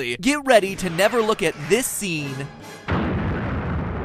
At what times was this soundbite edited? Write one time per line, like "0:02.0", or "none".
none